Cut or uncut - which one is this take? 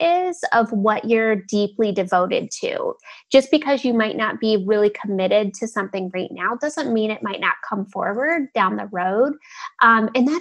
cut